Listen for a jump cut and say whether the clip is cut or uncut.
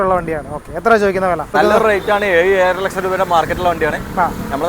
cut